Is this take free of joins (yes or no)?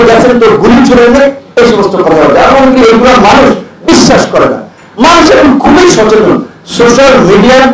yes